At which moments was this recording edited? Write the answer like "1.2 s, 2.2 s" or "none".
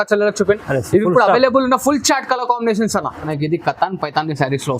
3.2 s